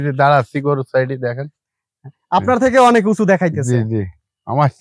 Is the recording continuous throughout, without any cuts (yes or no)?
yes